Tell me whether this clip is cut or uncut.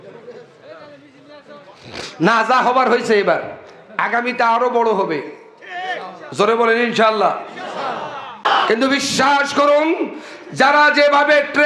cut